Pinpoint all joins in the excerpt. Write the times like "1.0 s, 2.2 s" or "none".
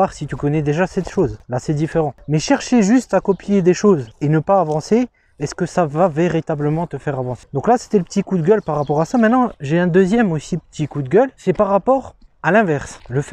none